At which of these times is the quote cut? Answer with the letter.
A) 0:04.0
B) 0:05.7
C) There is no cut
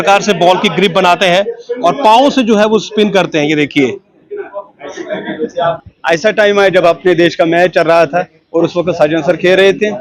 B